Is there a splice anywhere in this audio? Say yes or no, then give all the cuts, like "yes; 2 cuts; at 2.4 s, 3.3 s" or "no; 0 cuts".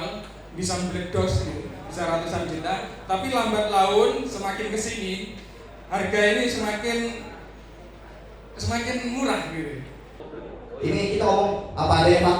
yes; 1 cut; at 10.2 s